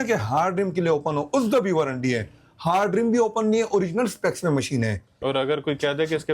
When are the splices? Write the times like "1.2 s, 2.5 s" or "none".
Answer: 5.2 s

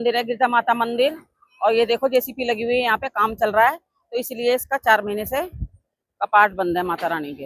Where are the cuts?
none

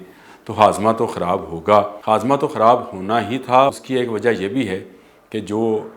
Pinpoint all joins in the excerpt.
2.0 s, 3.7 s

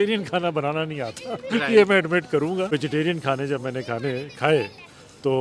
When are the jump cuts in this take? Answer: 2.7 s

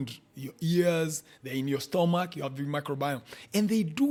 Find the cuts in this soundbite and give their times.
none

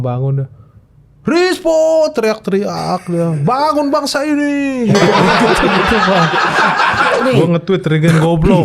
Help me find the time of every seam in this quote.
7.2 s

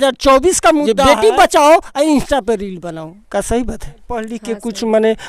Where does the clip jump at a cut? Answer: 0.9 s, 4.3 s

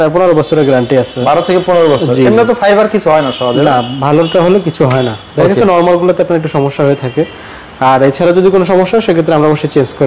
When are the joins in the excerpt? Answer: none

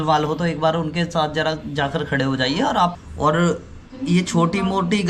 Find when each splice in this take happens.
3.0 s

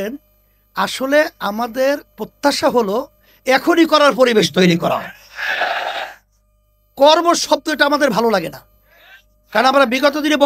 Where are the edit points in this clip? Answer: none

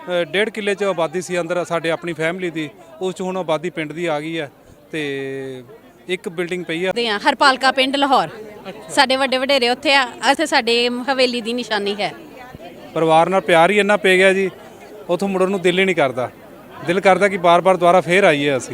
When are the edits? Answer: 6.9 s, 10.4 s, 12.5 s

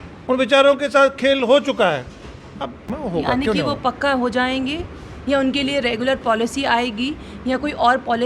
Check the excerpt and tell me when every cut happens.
2.9 s

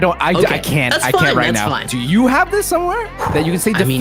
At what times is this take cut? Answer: 1.9 s, 3.1 s

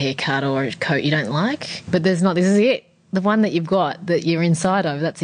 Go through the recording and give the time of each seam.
1.7 s

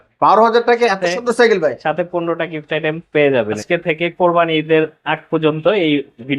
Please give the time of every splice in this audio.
3.6 s

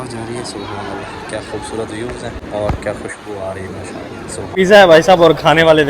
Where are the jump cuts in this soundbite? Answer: 2.4 s, 4.4 s

